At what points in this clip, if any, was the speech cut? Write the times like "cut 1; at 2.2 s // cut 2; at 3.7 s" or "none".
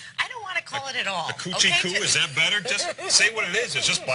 cut 1; at 2.7 s